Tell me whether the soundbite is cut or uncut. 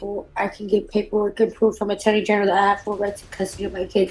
uncut